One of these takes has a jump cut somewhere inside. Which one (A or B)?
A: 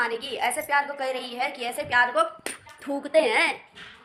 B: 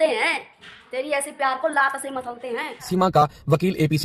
B